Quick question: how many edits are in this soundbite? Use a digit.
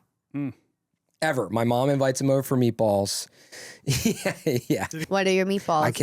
1